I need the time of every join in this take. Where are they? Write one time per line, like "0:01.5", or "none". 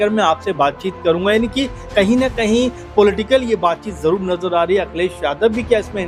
none